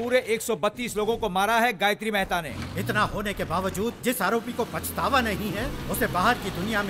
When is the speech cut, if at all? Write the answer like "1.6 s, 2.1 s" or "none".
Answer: 2.5 s